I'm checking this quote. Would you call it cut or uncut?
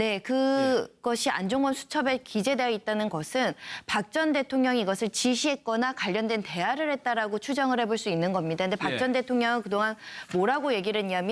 cut